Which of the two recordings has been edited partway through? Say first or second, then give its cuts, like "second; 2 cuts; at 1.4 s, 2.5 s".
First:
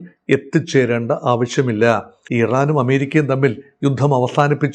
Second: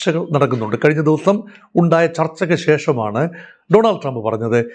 first; 1 cut; at 2.2 s